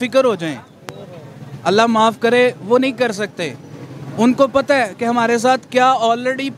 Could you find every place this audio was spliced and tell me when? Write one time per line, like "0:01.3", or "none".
none